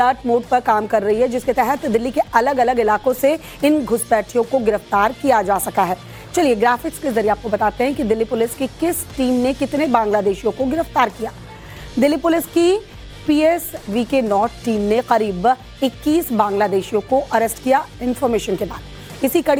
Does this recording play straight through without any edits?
yes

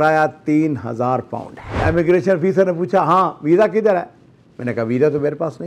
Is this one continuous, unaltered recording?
no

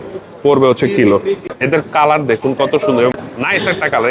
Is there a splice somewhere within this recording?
yes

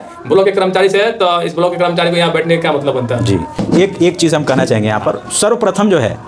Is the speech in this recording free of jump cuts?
no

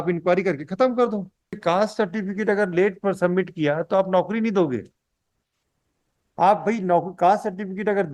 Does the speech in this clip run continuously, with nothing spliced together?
no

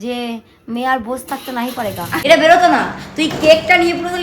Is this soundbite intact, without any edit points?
no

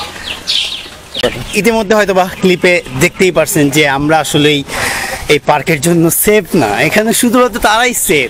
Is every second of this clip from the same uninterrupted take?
no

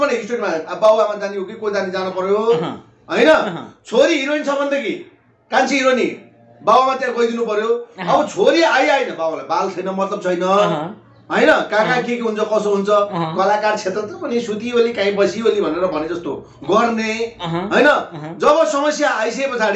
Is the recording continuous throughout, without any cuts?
yes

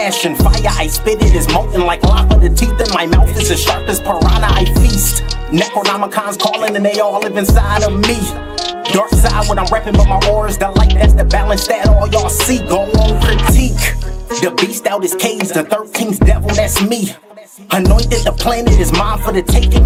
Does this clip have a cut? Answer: no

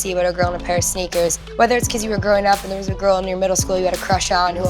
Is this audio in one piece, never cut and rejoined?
no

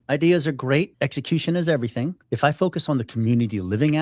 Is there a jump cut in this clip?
yes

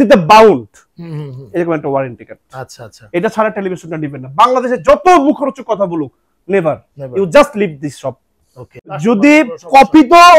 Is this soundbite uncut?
no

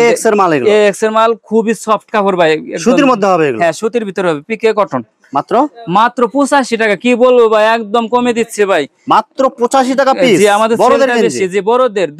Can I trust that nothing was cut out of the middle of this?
yes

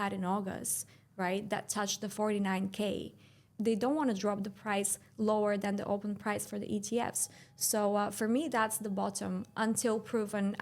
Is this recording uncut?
no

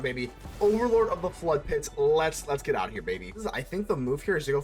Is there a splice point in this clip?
yes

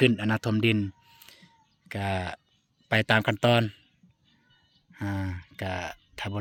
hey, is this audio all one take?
yes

